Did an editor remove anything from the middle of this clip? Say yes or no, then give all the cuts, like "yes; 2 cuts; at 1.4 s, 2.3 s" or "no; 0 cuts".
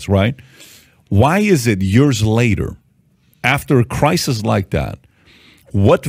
no; 0 cuts